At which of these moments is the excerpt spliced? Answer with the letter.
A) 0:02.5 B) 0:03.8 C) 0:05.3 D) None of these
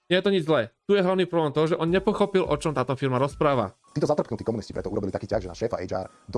B